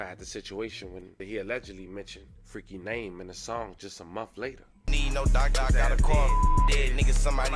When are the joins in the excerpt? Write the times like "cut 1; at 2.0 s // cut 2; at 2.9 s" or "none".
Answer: cut 1; at 1.2 s // cut 2; at 4.7 s